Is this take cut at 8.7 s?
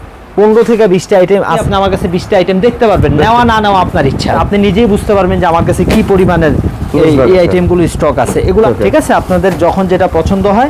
yes; 3 cuts; at 1.6 s, 4.4 s, 8.7 s

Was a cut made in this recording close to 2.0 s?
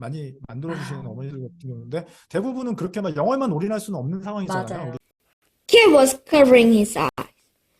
no; 1 cut; at 5.0 s

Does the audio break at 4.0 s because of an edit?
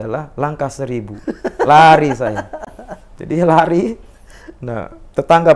no; 0 cuts

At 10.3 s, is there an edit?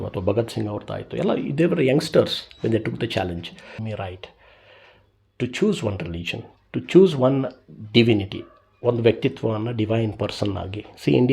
no; 1 cut; at 3.8 s

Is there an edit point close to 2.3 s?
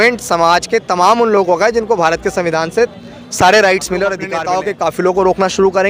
no; 1 cut; at 4.3 s

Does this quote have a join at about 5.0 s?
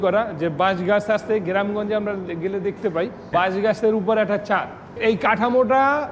yes; 2 cuts; at 3.3 s, 5.0 s

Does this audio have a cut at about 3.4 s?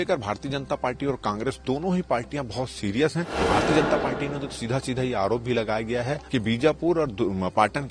yes; 2 cuts; at 3.4 s, 6.2 s

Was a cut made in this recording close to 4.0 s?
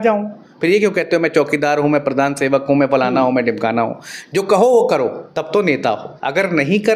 no; 2 cuts; at 5.2 s, 6.1 s

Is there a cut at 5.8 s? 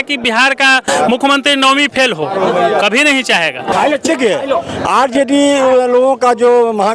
no; 1 cut; at 3.7 s

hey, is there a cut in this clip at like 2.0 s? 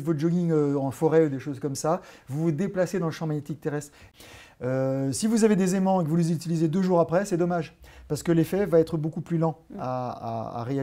no; 1 cut; at 4.0 s

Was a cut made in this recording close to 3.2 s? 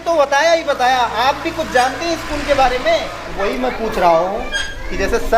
yes; 1 cut; at 3.2 s

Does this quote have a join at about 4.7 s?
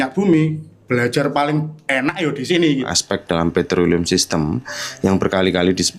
no; 1 cut; at 2.9 s

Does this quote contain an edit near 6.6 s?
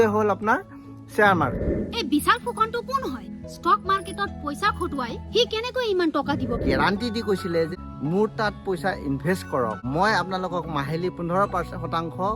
yes; 4 cuts; at 1.7 s, 6.6 s, 7.7 s, 9.8 s

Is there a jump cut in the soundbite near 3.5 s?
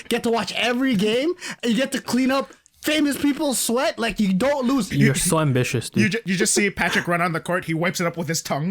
no; 2 cuts; at 4.9 s, 6.2 s

